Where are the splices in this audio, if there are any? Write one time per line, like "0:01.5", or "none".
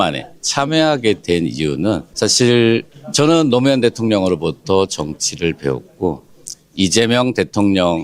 0:02.1
0:03.0